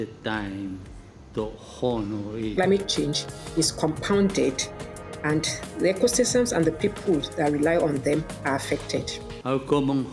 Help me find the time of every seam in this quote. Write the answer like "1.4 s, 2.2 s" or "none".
2.5 s, 9.2 s